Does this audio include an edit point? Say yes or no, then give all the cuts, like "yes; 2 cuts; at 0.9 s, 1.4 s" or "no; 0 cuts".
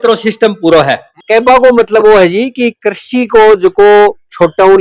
yes; 1 cut; at 1.1 s